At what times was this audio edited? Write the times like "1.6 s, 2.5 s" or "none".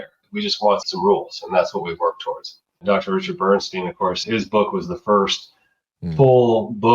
2.8 s, 4.2 s